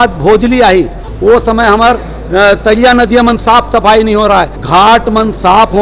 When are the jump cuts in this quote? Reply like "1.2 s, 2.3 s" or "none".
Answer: 1.1 s, 4.6 s